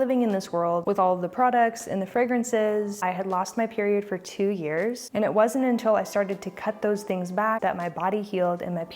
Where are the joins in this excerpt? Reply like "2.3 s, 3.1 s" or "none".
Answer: 0.8 s, 3.0 s, 5.0 s, 7.6 s